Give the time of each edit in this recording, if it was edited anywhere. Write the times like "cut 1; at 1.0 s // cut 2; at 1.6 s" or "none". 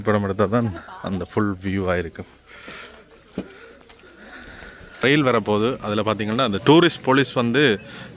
cut 1; at 5.0 s